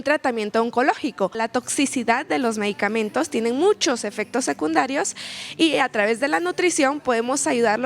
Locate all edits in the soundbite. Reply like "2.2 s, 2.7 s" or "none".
1.4 s